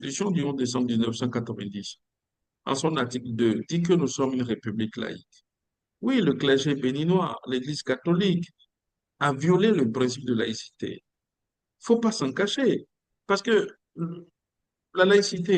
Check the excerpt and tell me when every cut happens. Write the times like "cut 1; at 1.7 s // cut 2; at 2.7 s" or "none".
none